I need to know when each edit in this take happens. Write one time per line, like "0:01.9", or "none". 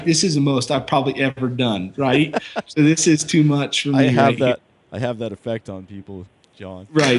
none